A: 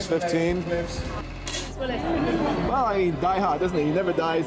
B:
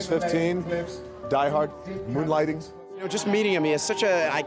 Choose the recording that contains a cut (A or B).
A